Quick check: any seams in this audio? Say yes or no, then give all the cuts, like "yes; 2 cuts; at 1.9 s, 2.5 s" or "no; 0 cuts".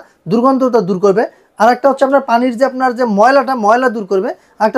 no; 0 cuts